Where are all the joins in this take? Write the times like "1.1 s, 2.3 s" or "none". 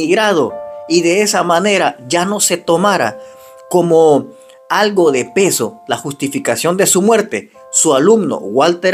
none